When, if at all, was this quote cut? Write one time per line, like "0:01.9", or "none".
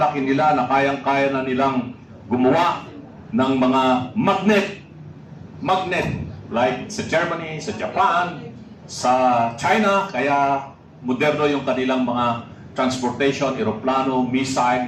none